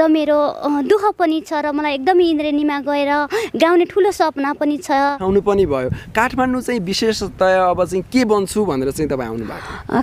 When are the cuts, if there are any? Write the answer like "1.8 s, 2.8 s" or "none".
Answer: 5.2 s